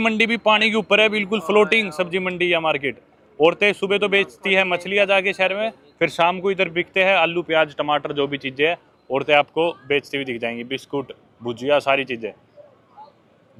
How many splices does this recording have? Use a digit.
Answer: 0